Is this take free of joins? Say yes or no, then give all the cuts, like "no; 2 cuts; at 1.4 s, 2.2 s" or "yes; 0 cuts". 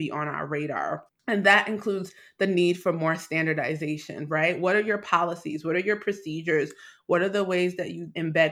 no; 1 cut; at 1.1 s